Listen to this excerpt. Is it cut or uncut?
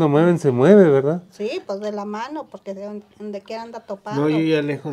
uncut